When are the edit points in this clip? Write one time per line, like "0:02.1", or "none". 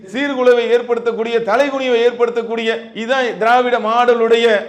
none